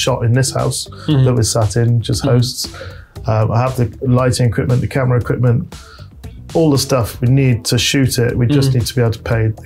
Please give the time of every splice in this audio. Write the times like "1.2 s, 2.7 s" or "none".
none

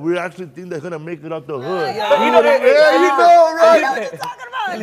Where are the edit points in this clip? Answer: 2.0 s

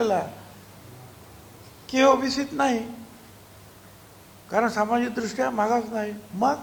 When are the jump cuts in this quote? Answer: none

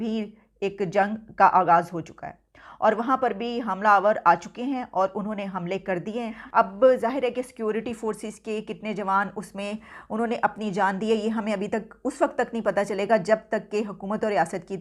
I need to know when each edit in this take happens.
none

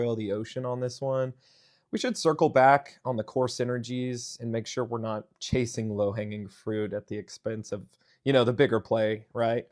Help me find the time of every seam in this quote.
none

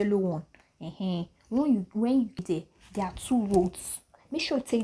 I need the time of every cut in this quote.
2.4 s

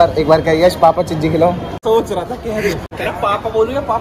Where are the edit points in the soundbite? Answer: 1.7 s, 2.8 s

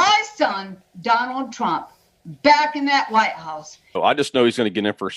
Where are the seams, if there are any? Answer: 3.9 s

